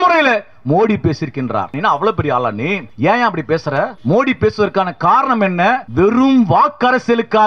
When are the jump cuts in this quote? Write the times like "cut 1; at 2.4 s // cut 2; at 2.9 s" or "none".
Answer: cut 1; at 1.8 s // cut 2; at 2.9 s // cut 3; at 4.0 s // cut 4; at 5.9 s

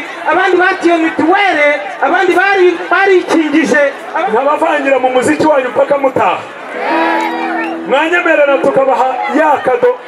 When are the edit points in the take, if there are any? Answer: cut 1; at 4.1 s

